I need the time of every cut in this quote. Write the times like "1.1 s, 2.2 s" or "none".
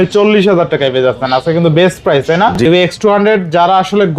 2.6 s